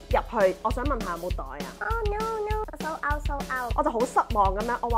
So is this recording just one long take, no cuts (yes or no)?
yes